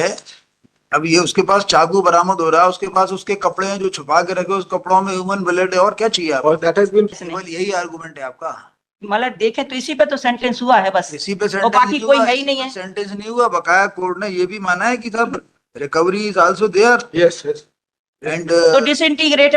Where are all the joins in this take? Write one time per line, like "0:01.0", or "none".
0:07.2